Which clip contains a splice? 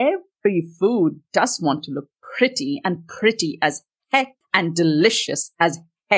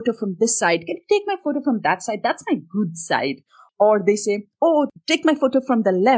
second; 2 cuts; at 3.6 s, 4.9 s

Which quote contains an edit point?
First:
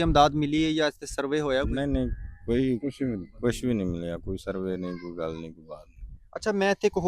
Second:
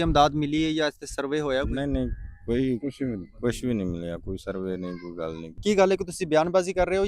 second; 1 cut; at 5.5 s

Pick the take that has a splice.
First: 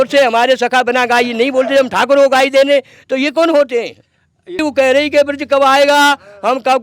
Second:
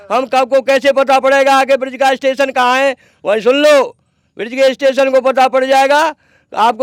first; 1 cut; at 4.6 s

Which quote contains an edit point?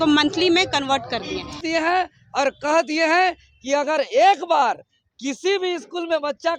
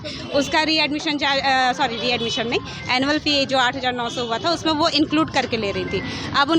first; 1 cut; at 1.6 s

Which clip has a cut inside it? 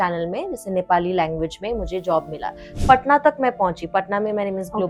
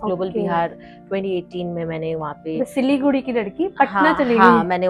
first; 1 cut; at 2.6 s

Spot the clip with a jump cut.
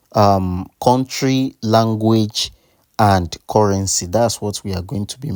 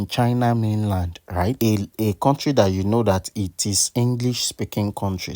second; 1 cut; at 1.6 s

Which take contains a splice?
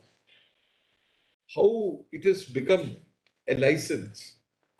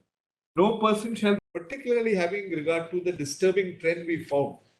second; 1 cut; at 1.4 s

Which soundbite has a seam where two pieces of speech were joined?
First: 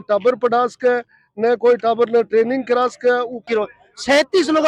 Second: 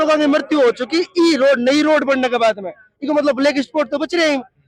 first; 1 cut; at 3.4 s

